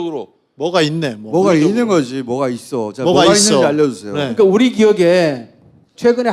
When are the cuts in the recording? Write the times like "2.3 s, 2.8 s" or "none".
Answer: none